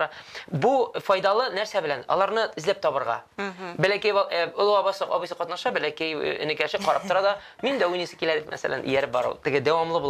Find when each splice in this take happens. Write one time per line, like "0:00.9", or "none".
none